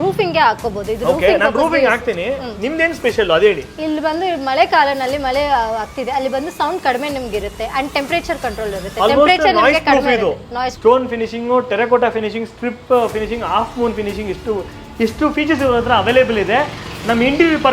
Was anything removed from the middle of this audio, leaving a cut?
yes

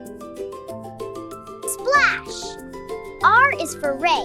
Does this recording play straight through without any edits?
yes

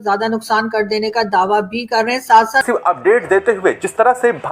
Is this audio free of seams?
no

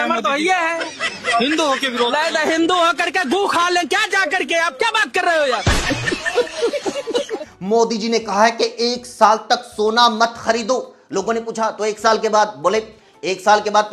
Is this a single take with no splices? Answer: no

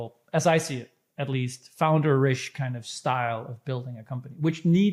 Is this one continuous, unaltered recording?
yes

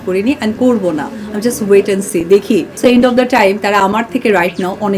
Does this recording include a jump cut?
yes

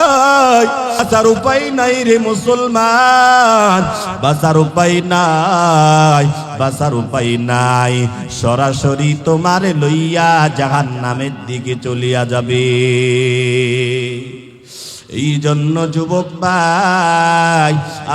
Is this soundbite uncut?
no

